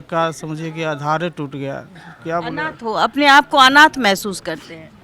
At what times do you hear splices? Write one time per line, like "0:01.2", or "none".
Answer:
none